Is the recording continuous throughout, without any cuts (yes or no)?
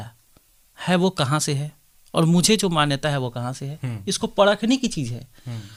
yes